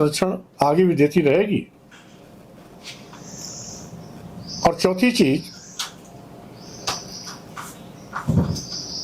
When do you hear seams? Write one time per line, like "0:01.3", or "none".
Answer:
none